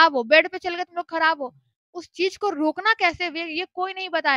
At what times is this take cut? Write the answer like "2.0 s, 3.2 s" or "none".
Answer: none